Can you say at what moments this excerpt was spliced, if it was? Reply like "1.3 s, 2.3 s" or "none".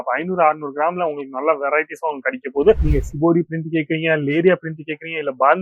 2.9 s